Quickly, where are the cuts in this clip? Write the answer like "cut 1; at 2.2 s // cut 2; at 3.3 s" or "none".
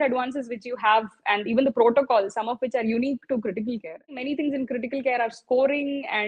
cut 1; at 4.2 s